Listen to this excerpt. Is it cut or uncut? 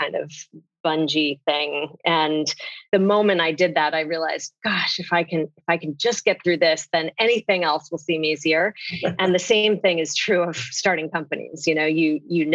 cut